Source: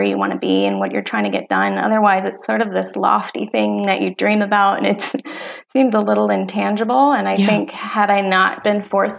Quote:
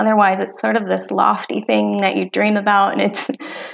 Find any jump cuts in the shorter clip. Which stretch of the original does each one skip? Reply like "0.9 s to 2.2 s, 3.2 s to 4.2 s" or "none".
none